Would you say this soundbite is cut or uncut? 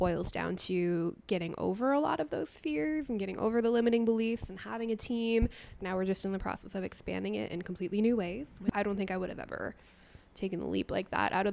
cut